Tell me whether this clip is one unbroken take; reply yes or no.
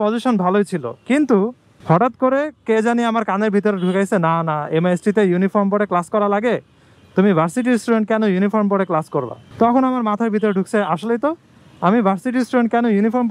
no